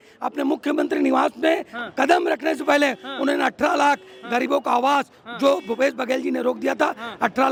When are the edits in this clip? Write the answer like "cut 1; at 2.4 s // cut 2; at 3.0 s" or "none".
none

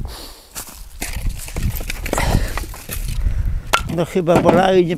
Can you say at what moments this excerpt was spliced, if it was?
cut 1; at 3.9 s

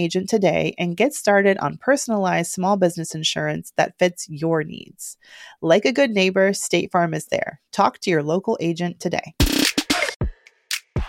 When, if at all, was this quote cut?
cut 1; at 10.2 s

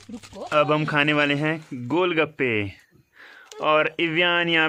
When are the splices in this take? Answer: none

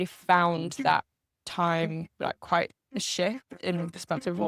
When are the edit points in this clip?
none

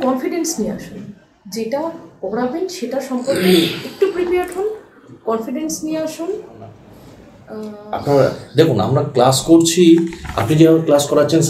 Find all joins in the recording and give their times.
cut 1; at 8.0 s

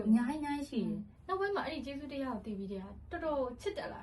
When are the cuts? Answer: cut 1; at 1.1 s

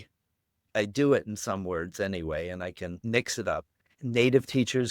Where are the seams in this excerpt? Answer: cut 1; at 3.0 s // cut 2; at 3.8 s

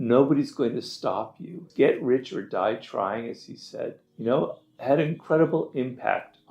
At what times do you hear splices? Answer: cut 1; at 1.6 s // cut 2; at 4.1 s

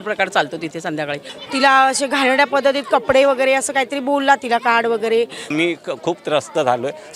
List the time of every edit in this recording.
cut 1; at 1.3 s // cut 2; at 5.5 s

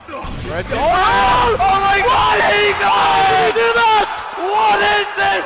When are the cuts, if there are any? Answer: cut 1; at 3.7 s

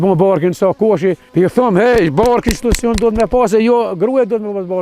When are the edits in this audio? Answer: cut 1; at 1.2 s

